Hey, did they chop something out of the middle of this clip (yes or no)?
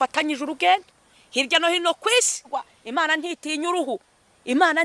yes